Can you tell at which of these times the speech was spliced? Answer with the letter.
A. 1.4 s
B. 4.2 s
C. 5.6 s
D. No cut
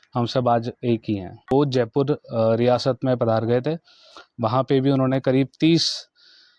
A